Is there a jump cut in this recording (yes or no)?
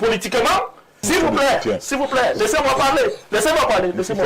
yes